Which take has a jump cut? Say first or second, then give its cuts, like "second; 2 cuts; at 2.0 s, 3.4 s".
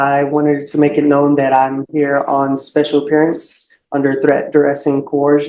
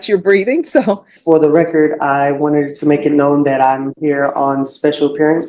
second; 1 cut; at 1.1 s